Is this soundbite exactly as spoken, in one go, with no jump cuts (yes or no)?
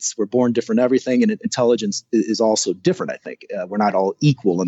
yes